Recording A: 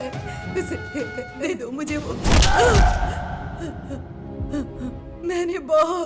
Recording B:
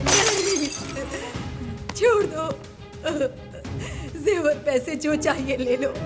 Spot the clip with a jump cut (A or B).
A